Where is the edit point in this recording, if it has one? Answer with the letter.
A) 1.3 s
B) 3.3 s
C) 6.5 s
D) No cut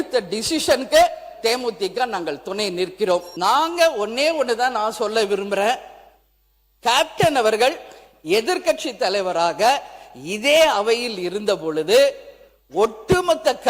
B